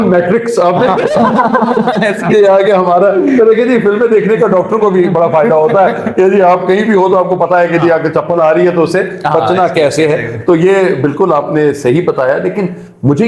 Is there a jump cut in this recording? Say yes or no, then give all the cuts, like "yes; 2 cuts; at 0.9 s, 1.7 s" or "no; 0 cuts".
no; 0 cuts